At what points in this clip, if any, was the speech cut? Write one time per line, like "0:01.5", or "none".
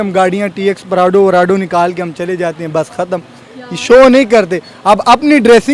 none